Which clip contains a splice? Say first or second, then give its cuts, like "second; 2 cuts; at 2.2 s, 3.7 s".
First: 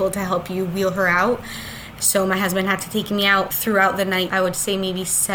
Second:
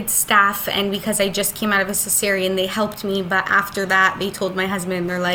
first; 2 cuts; at 3.5 s, 4.3 s